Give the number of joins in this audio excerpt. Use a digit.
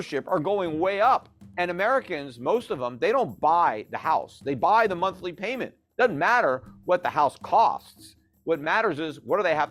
1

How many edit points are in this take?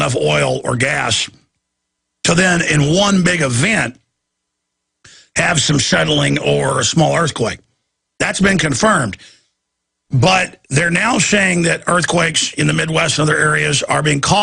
1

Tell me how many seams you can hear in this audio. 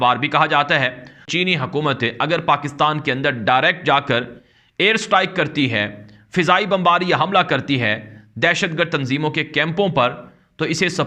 1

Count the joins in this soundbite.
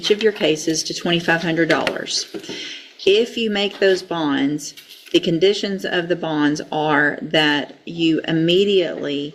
0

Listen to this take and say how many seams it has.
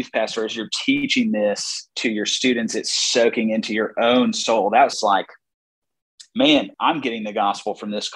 2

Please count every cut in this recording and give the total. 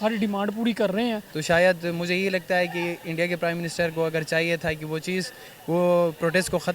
1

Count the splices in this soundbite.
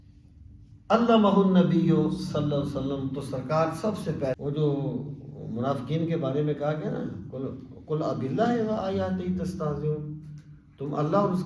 1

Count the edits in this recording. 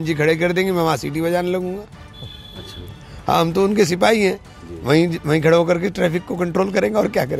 0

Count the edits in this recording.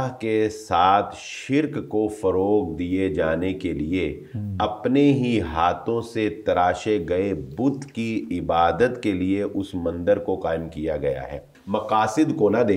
1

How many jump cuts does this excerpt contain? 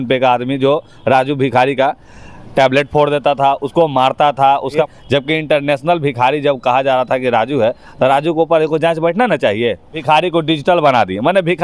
2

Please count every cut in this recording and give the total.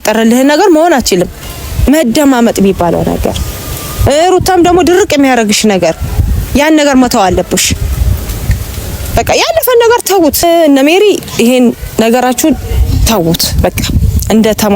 2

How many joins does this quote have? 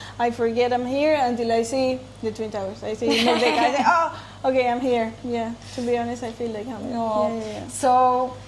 0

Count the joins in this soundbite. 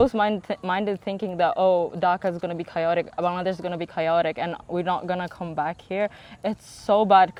0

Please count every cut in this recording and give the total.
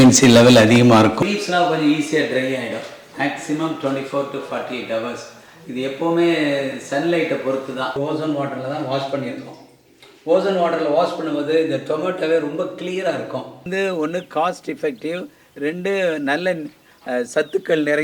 3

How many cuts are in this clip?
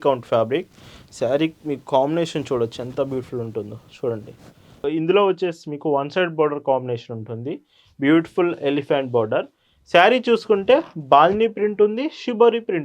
1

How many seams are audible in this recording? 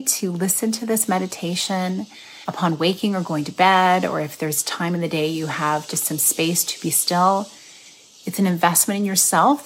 0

